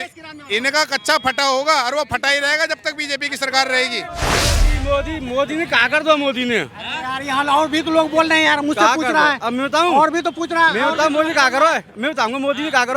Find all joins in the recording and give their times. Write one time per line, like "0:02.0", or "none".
0:04.6